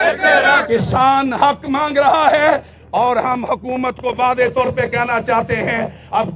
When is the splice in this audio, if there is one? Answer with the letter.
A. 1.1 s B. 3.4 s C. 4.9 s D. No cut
D